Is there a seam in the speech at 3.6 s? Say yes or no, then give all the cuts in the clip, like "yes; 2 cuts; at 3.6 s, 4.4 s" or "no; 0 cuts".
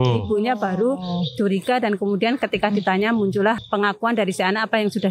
yes; 1 cut; at 3.6 s